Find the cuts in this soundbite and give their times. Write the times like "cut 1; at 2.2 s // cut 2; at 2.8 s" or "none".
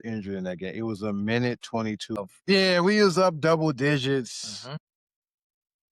cut 1; at 2.2 s